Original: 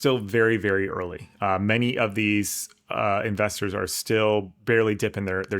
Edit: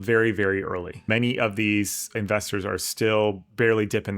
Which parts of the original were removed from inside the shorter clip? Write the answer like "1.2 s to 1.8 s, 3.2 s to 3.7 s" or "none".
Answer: 1.3 s to 1.6 s, 2.7 s to 3.2 s